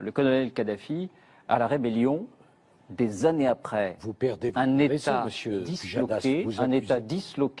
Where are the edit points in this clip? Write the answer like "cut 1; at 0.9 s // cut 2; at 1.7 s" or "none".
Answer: cut 1; at 1.6 s